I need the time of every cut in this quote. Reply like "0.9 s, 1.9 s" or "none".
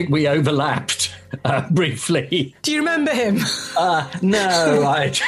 2.6 s